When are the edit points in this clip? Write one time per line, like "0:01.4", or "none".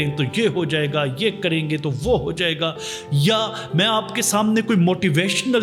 none